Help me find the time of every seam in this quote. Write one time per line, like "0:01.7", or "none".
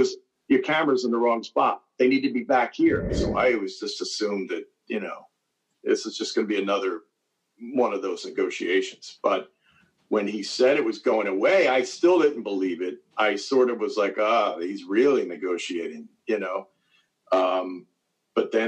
0:03.2